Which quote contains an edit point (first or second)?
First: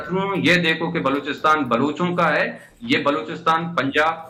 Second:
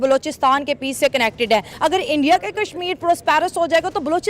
second